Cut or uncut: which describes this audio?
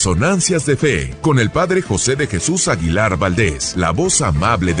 cut